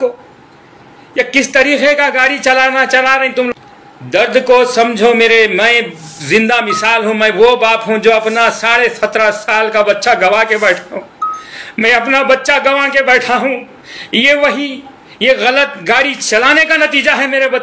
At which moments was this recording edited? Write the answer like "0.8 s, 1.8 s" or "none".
3.5 s